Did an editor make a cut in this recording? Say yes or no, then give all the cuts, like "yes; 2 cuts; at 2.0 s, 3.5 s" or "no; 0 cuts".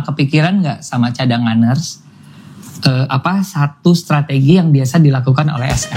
no; 0 cuts